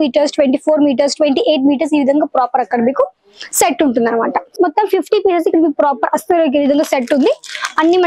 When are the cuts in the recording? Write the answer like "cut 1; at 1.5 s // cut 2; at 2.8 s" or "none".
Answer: cut 1; at 4.6 s